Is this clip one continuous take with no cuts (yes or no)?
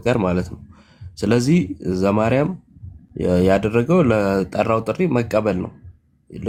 yes